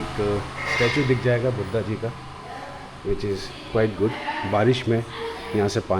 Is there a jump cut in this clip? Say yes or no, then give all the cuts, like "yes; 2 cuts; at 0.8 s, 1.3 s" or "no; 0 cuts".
no; 0 cuts